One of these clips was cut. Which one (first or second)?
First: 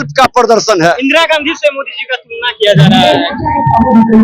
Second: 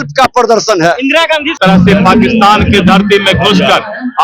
second